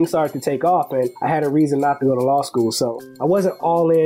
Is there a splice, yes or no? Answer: yes